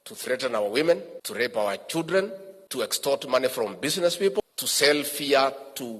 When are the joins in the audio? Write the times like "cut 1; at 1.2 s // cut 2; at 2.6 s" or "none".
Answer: cut 1; at 1.2 s // cut 2; at 3.0 s // cut 3; at 4.4 s